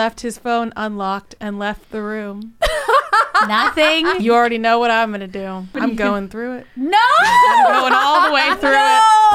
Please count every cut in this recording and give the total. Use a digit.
2